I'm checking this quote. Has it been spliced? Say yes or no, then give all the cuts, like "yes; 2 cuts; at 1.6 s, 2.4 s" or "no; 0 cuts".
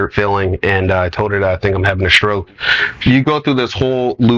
yes; 1 cut; at 3.0 s